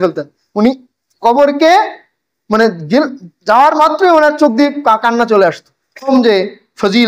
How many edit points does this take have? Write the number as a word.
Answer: one